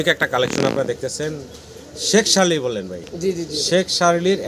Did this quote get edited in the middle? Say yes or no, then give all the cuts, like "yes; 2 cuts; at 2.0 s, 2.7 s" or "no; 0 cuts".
no; 0 cuts